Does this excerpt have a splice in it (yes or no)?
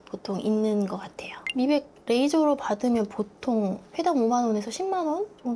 yes